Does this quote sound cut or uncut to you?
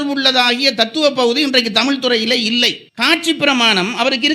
cut